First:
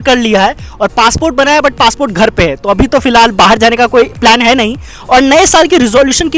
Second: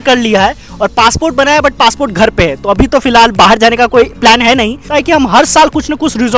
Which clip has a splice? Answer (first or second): second